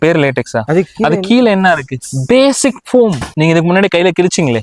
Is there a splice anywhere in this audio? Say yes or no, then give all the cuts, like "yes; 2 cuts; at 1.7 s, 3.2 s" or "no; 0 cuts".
no; 0 cuts